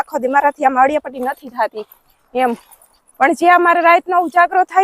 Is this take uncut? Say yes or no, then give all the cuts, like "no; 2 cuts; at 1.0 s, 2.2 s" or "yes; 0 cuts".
no; 1 cut; at 3.0 s